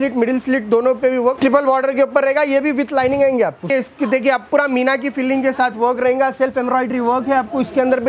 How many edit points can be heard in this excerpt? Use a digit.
2